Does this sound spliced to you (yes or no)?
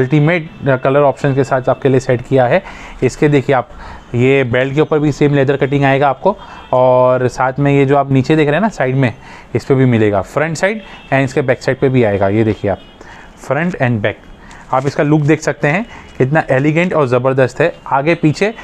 no